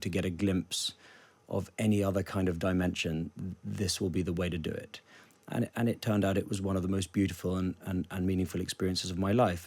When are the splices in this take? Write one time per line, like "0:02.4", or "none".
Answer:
none